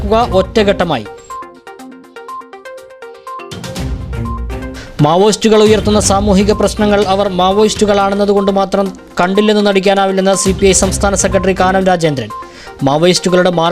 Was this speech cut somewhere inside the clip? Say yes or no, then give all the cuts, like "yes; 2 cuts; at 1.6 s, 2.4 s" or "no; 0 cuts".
no; 0 cuts